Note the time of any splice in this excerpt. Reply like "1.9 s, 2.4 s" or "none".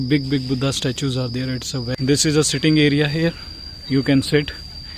2.0 s